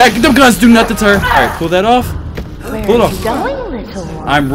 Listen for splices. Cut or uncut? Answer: cut